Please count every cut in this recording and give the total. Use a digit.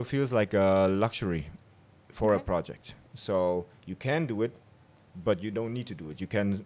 0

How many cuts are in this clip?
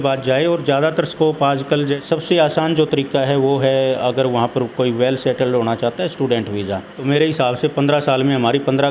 2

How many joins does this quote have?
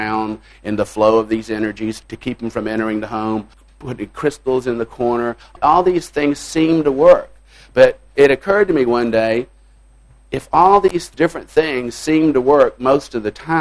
5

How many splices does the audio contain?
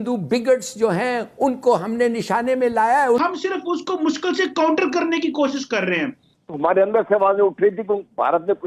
2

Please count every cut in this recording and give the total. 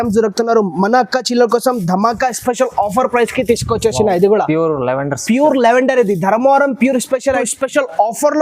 1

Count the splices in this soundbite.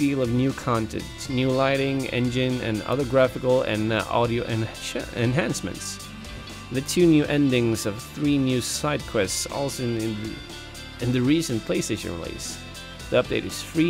1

